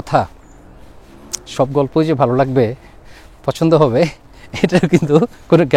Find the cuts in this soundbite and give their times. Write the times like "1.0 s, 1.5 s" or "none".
none